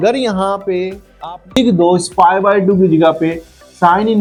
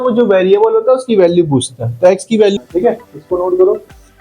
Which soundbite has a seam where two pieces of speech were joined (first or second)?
second